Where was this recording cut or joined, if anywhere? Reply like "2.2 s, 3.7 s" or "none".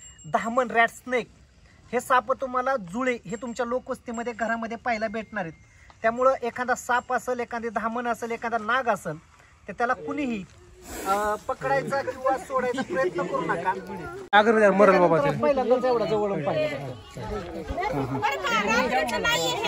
14.3 s